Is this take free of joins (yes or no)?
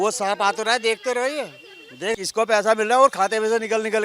no